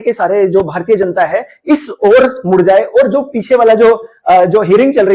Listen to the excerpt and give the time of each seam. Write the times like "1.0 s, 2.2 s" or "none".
none